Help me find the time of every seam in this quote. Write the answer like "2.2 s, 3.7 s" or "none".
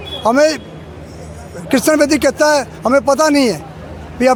none